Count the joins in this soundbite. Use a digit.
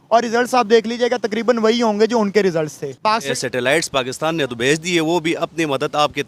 1